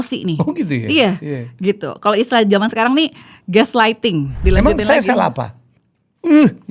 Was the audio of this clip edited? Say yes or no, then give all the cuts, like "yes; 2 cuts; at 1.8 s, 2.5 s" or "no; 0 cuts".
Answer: yes; 1 cut; at 4.4 s